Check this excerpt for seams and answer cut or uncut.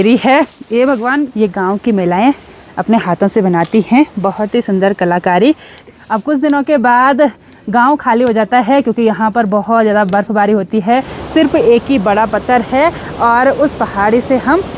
cut